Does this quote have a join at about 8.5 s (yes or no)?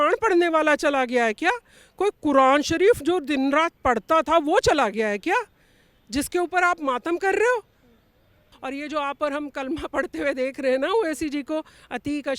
yes